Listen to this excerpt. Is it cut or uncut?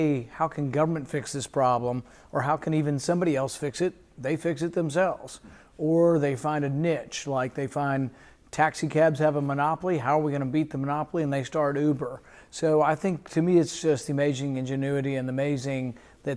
uncut